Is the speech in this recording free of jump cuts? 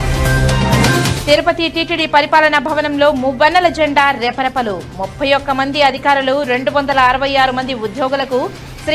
yes; 0 cuts

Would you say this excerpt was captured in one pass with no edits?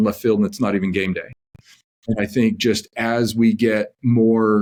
yes; 0 cuts

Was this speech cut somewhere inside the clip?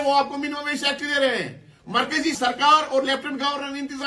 yes; 1 cut; at 2.3 s

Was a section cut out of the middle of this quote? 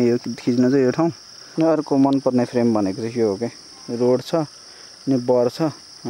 yes; 1 cut; at 1.5 s

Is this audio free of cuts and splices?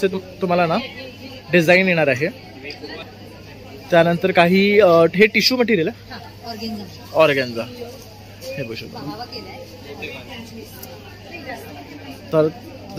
yes; 0 cuts

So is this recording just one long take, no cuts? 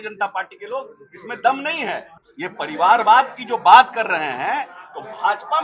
no; 1 cut; at 2.1 s

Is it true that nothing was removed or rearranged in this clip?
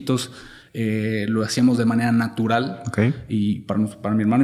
yes; 0 cuts

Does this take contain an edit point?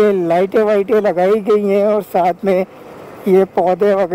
no; 0 cuts

